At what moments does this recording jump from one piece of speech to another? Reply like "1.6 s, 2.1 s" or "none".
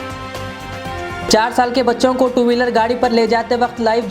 1.1 s